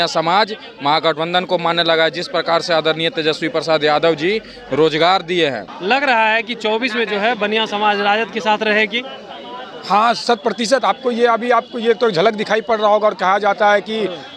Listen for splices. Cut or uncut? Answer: cut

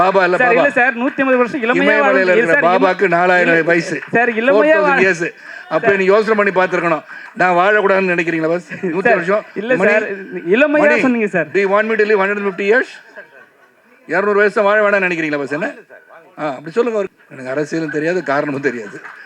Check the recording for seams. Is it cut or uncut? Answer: cut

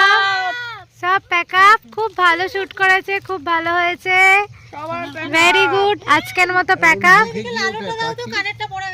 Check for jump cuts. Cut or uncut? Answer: uncut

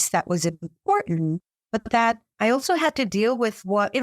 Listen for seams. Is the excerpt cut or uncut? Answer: cut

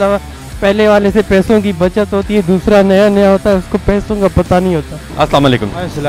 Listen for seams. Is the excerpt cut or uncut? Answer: cut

